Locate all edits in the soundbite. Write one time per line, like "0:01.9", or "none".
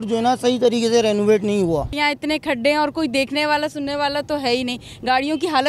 0:01.9